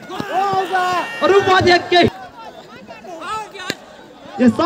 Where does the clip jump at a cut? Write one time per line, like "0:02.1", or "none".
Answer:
0:02.1